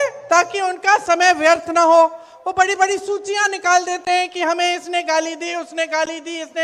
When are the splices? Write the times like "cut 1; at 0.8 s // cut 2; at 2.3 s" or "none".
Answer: none

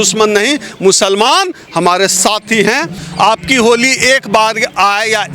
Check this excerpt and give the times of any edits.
cut 1; at 3.0 s

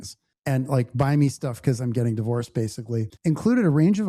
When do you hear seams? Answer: cut 1; at 3.1 s

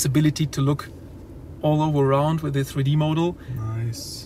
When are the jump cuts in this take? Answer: none

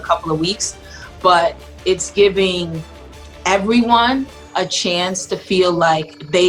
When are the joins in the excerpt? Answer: none

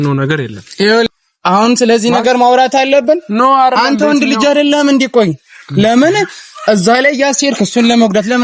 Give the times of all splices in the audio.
cut 1; at 1.1 s

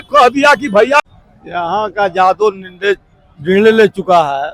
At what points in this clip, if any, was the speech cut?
cut 1; at 1.0 s

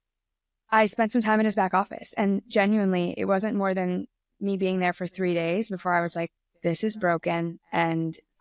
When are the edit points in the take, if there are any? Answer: none

